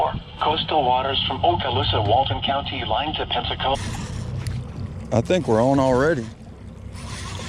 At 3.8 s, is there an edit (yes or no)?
yes